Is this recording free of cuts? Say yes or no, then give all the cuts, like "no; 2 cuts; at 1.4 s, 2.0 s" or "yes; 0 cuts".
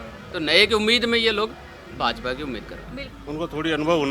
no; 1 cut; at 3.1 s